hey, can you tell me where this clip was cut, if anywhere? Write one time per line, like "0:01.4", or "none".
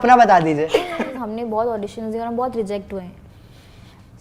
0:01.2